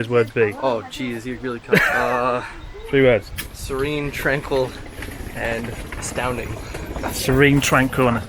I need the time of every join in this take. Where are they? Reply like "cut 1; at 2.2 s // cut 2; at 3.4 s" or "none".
none